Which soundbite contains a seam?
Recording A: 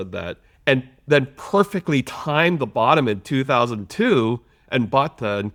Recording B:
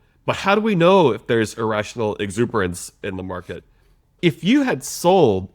B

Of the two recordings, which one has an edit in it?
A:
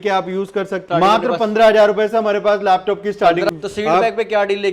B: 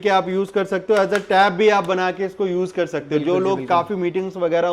A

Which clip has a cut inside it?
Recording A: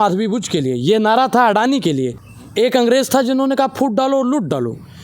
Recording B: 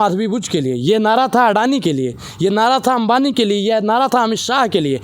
A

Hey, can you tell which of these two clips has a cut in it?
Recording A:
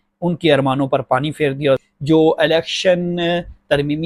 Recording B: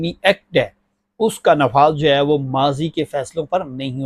A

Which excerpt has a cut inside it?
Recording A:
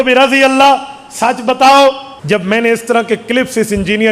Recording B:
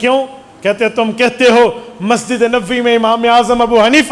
A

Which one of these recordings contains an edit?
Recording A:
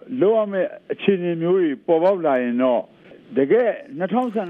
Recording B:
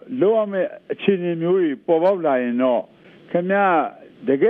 A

